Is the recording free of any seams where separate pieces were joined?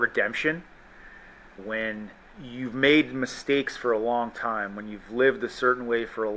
no; 2 cuts; at 1.6 s, 2.4 s

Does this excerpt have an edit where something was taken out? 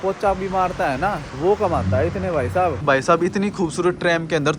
yes; 2 cuts; at 1.3 s, 2.8 s

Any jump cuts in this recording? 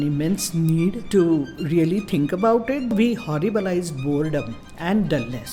yes; 3 cuts; at 1.0 s, 2.9 s, 4.6 s

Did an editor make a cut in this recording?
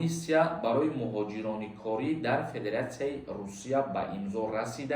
no; 0 cuts

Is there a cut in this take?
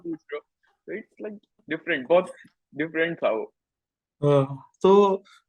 no; 0 cuts

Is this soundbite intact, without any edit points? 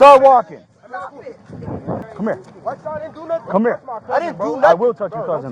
no; 1 cut; at 2.0 s

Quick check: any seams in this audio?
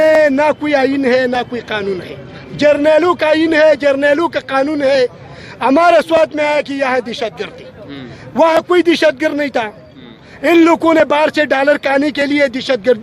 no; 0 cuts

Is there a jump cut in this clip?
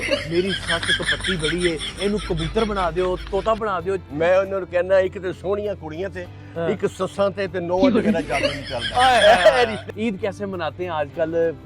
yes; 2 cuts; at 4.0 s, 9.8 s

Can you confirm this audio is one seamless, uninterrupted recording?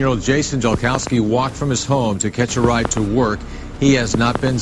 yes; 0 cuts

